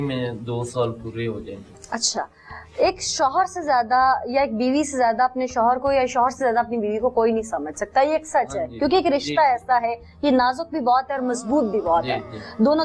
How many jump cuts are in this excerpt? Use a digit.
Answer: 0